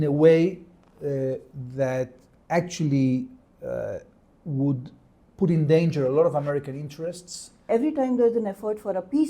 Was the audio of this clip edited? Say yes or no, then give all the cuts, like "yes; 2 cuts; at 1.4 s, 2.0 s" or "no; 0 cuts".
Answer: yes; 1 cut; at 7.6 s